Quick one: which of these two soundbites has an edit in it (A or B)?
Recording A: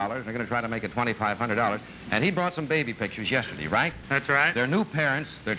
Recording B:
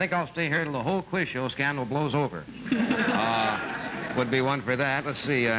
A